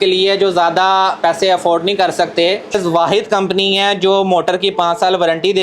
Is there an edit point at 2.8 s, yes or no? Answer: yes